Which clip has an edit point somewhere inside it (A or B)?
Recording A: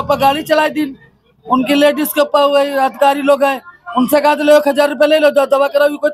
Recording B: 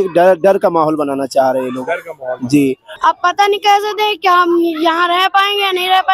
B